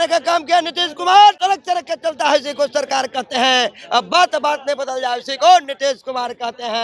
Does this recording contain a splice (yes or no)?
yes